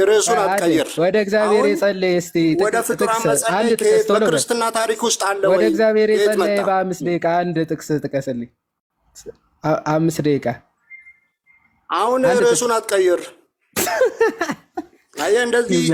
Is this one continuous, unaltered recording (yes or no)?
yes